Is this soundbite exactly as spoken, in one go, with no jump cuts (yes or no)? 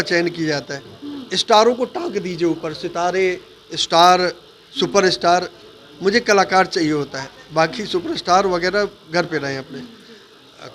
yes